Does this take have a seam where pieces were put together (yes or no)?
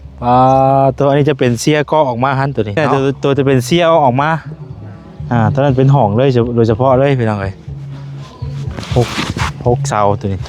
yes